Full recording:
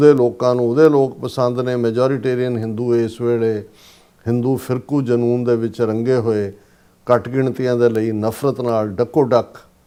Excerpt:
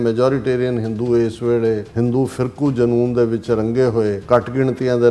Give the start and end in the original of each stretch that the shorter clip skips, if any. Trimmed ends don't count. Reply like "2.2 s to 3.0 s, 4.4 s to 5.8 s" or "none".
3.7 s to 4.2 s, 6.5 s to 7.0 s